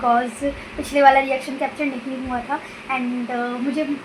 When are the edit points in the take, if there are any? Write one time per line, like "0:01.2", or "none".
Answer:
none